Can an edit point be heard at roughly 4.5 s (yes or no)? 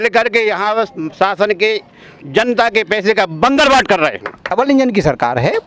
yes